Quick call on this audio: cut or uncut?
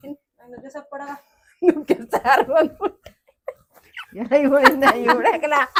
uncut